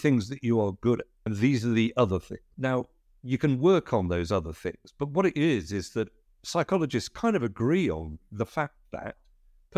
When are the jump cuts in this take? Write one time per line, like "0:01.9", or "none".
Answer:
0:01.2
0:02.4